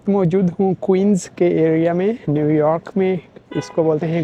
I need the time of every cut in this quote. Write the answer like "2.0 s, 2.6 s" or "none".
none